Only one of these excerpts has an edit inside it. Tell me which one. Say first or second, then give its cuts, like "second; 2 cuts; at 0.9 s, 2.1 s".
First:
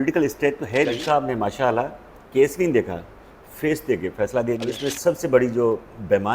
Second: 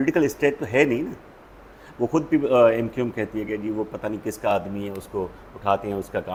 first; 2 cuts; at 1.0 s, 4.7 s